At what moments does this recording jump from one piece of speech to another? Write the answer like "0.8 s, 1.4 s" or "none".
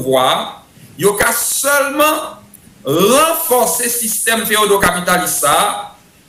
none

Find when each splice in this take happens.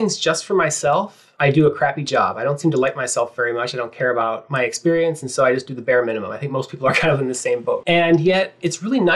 1.2 s, 7.8 s

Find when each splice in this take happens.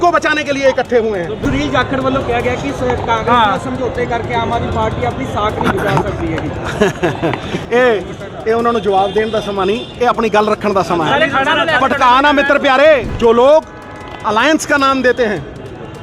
1.4 s, 13.1 s

